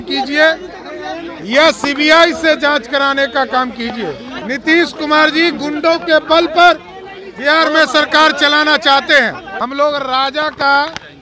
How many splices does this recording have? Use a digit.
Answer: 2